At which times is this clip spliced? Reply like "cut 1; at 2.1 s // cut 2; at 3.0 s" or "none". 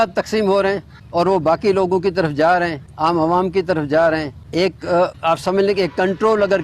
cut 1; at 0.9 s // cut 2; at 2.8 s // cut 3; at 4.4 s // cut 4; at 5.2 s